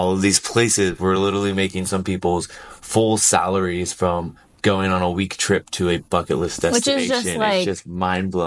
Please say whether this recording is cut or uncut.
uncut